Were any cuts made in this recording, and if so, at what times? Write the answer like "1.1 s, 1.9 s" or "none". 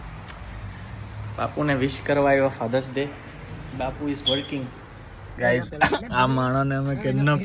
5.3 s